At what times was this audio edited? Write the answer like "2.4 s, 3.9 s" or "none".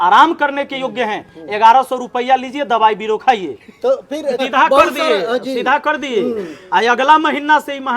4.4 s